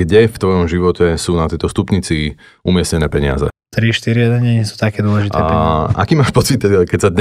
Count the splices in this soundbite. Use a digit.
2